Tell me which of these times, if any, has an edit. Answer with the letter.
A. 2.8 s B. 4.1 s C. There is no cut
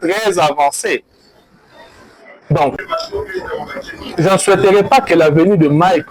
A